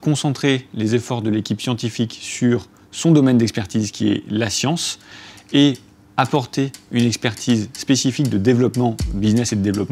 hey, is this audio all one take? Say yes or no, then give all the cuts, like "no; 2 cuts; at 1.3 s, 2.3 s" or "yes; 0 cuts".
yes; 0 cuts